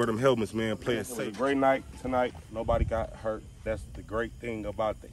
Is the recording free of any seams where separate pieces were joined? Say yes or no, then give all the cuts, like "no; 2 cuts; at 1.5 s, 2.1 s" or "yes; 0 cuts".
no; 3 cuts; at 1.1 s, 2.5 s, 3.6 s